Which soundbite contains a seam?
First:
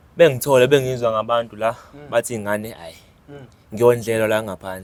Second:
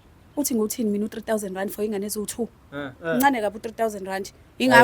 second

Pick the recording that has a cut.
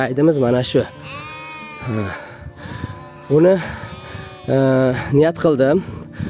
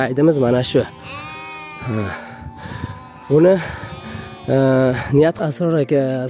second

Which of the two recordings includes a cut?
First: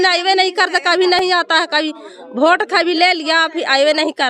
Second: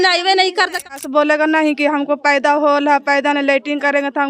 second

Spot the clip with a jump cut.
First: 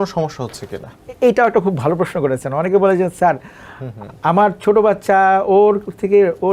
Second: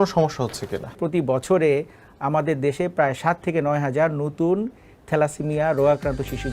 second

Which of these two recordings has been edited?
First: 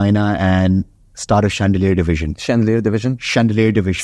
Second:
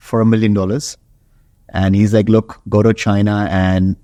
first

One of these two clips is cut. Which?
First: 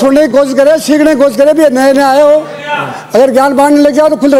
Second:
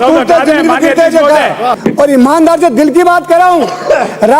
second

